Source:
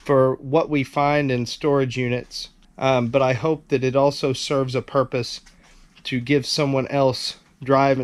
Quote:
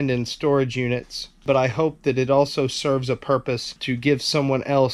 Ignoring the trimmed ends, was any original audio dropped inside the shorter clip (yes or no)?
yes